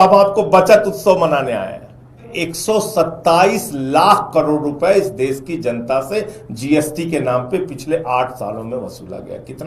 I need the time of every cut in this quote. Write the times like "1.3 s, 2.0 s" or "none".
2.3 s